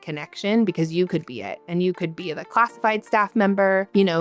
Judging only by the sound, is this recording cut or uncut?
uncut